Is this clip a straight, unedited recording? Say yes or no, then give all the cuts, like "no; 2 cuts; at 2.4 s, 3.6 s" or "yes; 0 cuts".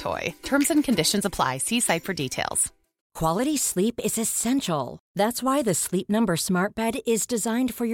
no; 1 cut; at 3.0 s